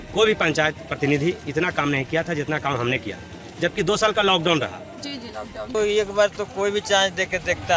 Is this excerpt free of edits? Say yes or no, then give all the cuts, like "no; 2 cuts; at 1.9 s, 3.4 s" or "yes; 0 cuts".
no; 1 cut; at 5.7 s